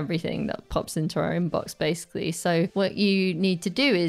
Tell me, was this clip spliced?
yes; 1 cut; at 2.7 s

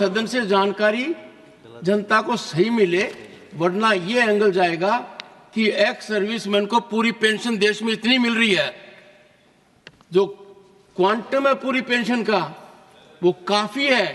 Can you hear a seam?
no; 0 cuts

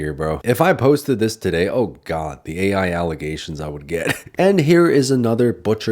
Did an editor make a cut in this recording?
yes; 1 cut; at 4.2 s

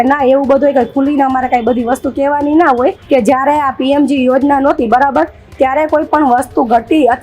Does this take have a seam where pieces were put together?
yes; 1 cut; at 3.0 s

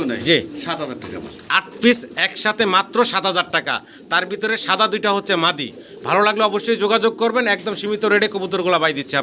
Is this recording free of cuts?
yes; 0 cuts

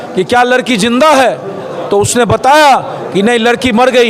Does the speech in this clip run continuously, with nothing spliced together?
yes; 0 cuts

